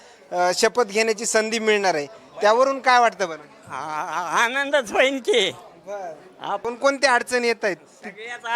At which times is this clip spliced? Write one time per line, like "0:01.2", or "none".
0:06.6